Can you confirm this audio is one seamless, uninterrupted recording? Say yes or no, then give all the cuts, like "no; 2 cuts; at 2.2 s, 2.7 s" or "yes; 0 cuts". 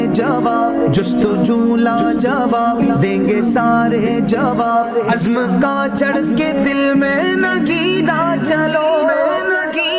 yes; 0 cuts